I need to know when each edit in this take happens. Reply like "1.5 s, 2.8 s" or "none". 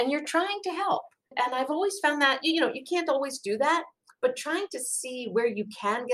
1.2 s